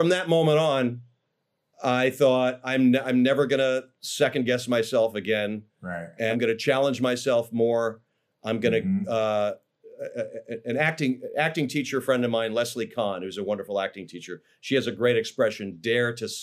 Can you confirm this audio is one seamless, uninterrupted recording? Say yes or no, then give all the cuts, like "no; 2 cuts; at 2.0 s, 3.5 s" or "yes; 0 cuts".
no; 1 cut; at 6.3 s